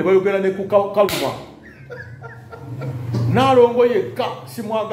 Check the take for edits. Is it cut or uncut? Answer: uncut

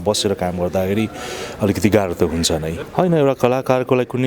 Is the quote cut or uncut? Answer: cut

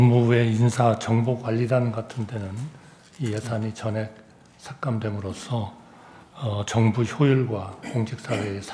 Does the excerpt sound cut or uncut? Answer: uncut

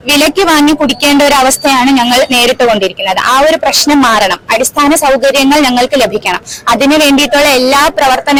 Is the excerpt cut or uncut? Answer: uncut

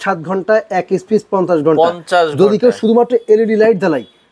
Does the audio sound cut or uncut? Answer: uncut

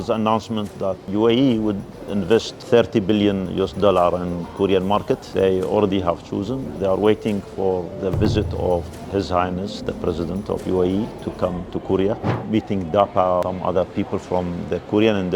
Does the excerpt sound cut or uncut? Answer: cut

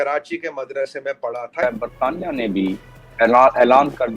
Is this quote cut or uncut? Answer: cut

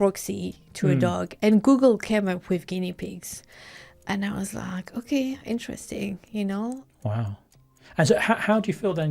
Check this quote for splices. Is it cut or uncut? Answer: cut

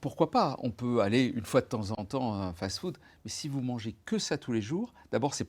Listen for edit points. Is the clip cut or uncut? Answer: uncut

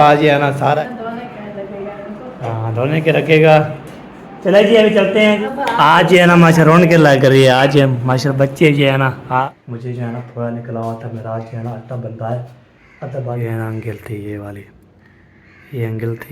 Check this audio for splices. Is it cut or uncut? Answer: cut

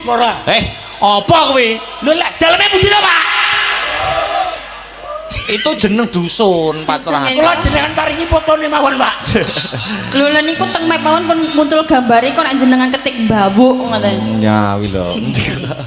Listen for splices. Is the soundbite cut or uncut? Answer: uncut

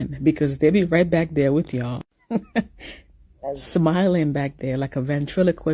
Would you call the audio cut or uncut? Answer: uncut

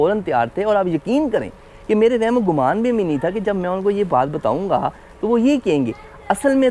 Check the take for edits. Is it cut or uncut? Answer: uncut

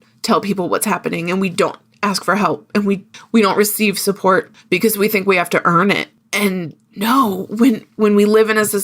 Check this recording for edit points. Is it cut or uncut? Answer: uncut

